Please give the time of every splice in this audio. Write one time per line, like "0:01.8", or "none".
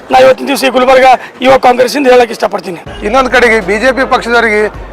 0:02.9